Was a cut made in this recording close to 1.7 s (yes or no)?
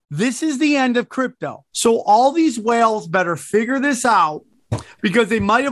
yes